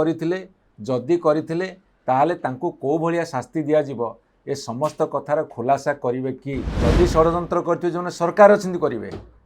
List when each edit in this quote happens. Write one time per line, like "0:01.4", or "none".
0:06.7